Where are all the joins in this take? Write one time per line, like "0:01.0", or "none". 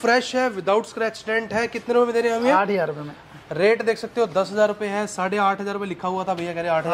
none